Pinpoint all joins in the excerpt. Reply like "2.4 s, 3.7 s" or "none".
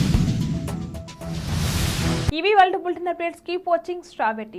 none